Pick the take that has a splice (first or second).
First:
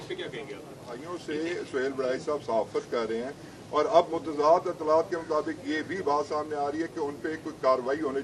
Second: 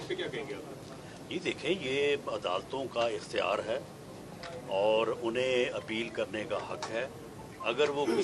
first